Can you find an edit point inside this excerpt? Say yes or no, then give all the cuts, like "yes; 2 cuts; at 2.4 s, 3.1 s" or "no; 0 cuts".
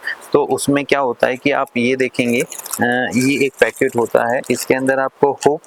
no; 0 cuts